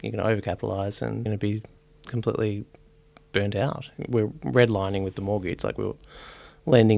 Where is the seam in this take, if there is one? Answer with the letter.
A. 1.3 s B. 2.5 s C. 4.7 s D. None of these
A